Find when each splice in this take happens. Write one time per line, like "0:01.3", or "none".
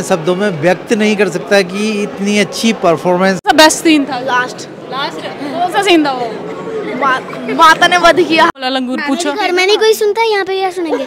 0:03.4
0:08.5